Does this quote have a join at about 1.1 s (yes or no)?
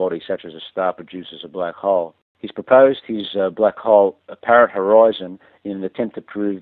yes